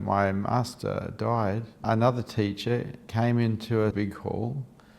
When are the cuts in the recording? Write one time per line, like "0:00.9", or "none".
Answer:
0:01.8
0:03.9